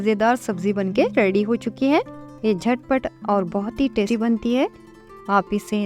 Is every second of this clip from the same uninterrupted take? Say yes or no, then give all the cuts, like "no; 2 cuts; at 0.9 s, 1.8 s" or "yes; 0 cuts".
no; 2 cuts; at 2.2 s, 4.1 s